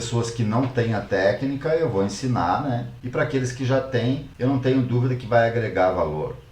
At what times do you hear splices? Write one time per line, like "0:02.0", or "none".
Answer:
0:02.9
0:04.3